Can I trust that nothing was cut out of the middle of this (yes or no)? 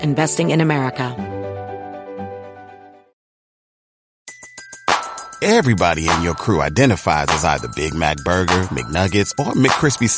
no